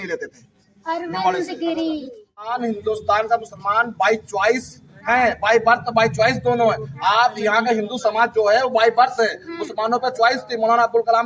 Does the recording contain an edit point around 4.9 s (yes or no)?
no